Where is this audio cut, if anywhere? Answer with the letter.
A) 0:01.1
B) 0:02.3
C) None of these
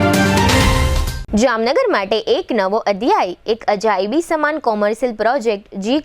A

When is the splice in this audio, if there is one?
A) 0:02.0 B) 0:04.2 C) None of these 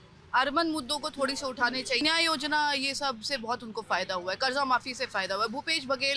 A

